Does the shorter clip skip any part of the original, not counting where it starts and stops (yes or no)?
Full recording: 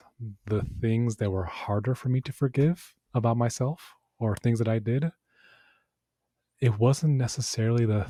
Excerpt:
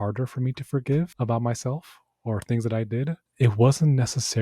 yes